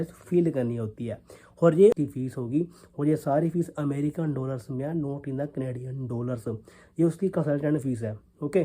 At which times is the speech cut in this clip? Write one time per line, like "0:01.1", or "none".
0:02.0

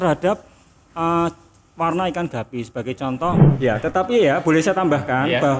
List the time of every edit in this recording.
0:03.5

